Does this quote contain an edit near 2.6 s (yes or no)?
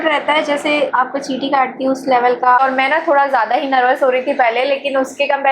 yes